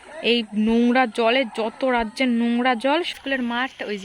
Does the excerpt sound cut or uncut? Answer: cut